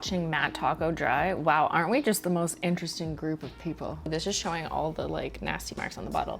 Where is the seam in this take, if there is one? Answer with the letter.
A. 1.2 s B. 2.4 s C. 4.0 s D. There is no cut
C